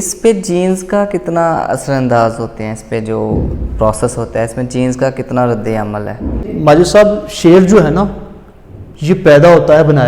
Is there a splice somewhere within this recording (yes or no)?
yes